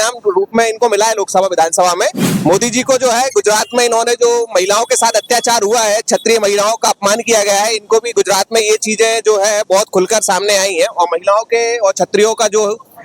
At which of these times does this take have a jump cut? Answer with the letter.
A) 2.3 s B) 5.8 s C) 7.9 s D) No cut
A